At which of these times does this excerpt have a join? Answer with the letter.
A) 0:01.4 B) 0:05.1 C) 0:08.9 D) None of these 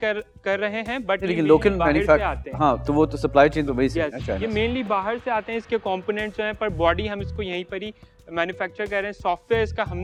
D